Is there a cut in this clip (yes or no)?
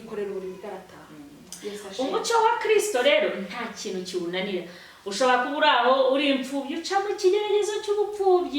no